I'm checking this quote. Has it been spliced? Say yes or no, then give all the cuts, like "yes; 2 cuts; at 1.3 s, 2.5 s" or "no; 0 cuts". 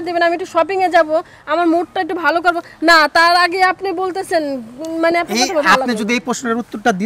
no; 0 cuts